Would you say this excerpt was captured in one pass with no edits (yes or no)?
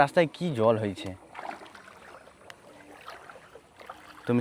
yes